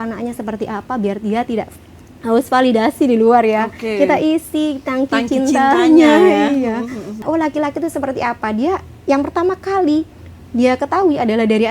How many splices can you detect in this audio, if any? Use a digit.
1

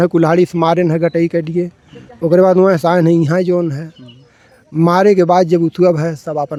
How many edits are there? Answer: 0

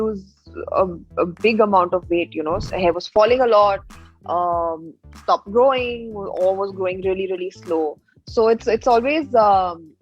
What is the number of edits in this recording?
1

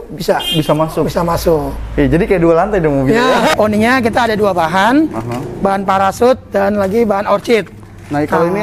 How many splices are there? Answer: 1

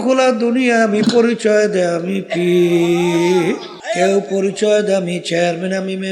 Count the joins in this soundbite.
1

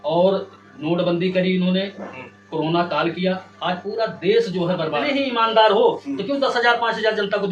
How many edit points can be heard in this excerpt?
1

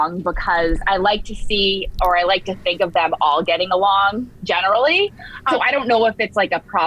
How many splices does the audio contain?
1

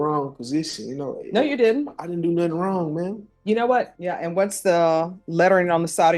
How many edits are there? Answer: 1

